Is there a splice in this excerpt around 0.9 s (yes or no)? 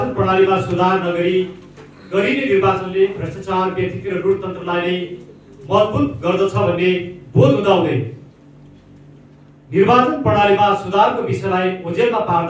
no